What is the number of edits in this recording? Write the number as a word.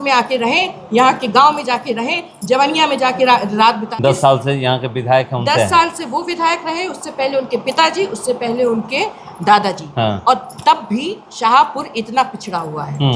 one